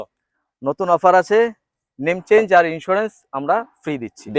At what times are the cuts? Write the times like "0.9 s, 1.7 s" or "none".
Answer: none